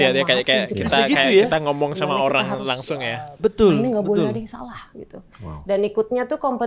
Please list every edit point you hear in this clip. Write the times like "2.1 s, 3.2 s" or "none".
none